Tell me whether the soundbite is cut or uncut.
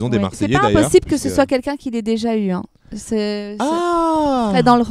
uncut